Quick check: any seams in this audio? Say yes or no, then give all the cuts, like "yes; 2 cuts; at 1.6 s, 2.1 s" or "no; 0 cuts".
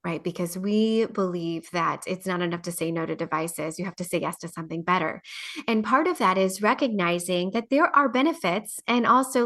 no; 0 cuts